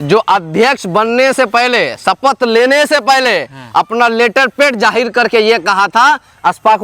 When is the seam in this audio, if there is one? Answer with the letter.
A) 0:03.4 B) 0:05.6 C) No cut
C